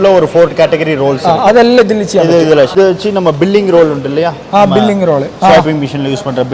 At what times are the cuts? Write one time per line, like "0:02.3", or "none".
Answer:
0:02.7